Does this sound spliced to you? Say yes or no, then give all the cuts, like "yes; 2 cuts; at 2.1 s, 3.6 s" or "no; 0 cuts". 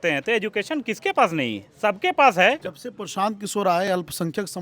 yes; 1 cut; at 2.7 s